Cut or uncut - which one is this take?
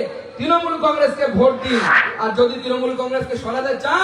cut